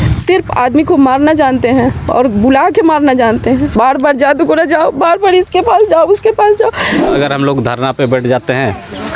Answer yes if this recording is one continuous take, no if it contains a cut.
no